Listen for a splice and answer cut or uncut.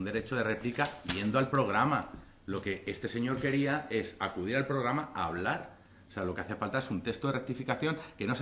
uncut